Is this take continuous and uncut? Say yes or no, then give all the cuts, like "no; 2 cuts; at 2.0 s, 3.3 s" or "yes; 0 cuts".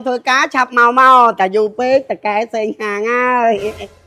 yes; 0 cuts